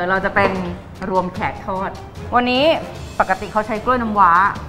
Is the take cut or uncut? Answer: cut